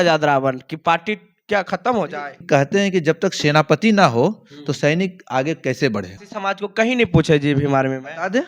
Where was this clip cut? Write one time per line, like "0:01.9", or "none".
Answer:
0:02.4
0:06.2